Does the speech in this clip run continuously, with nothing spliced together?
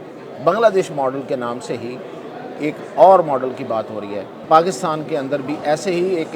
no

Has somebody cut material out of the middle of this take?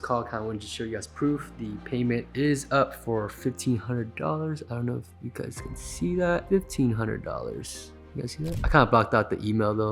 yes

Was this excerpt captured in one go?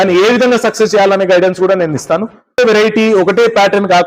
no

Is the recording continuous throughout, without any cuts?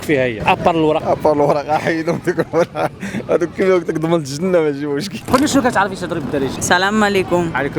no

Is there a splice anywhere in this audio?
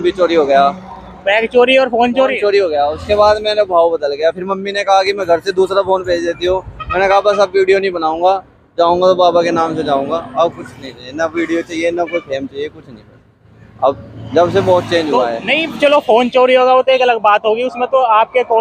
no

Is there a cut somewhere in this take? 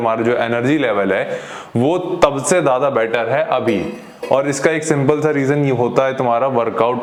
no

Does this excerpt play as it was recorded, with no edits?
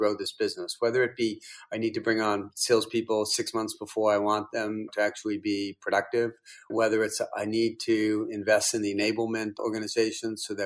no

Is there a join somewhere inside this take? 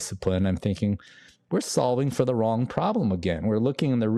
no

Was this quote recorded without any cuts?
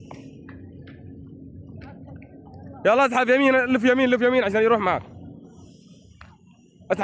yes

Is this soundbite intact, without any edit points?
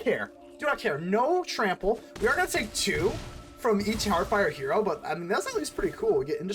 yes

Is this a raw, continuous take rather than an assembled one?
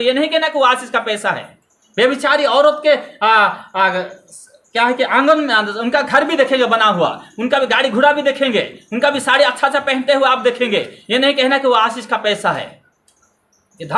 yes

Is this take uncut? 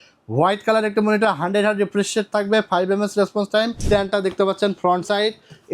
no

